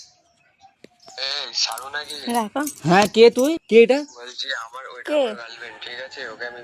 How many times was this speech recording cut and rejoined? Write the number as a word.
one